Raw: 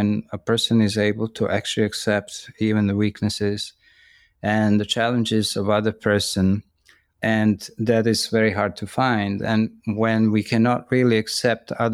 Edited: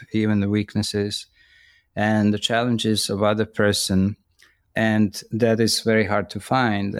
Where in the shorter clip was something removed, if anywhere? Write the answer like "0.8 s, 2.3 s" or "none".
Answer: none